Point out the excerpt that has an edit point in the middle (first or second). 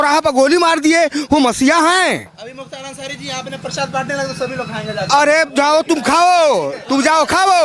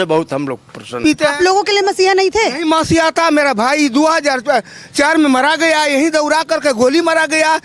second